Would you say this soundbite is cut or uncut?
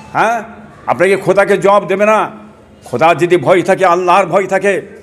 cut